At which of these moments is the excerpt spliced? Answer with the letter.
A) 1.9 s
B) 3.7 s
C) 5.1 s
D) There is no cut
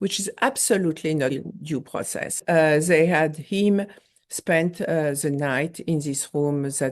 A